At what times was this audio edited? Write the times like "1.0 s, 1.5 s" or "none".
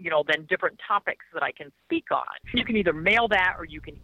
2.5 s